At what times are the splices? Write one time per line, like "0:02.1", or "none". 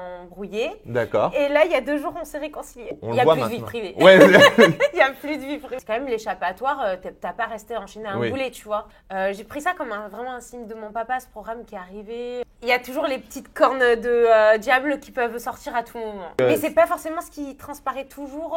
0:02.9
0:05.7
0:08.9
0:12.4
0:16.4